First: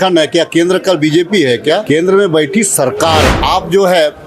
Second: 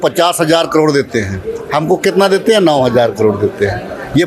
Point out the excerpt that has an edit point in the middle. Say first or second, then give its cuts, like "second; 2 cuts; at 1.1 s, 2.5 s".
first; 2 cuts; at 1.8 s, 3.4 s